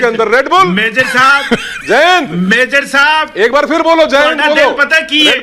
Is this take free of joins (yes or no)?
yes